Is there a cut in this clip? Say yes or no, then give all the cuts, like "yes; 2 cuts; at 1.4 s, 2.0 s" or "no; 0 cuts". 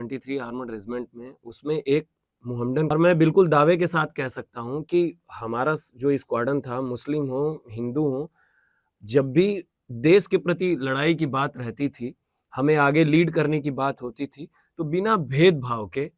yes; 1 cut; at 2.9 s